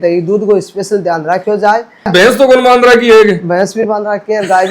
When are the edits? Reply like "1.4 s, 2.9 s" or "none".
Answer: 2.1 s